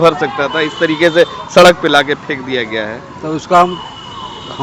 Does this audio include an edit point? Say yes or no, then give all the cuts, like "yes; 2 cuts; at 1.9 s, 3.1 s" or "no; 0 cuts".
no; 0 cuts